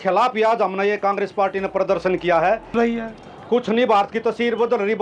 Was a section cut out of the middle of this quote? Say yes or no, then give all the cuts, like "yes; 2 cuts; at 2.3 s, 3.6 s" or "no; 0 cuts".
yes; 1 cut; at 2.7 s